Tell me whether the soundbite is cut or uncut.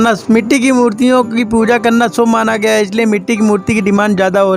uncut